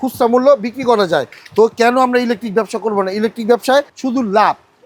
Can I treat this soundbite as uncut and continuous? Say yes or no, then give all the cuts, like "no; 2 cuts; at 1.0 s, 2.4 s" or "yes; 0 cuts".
yes; 0 cuts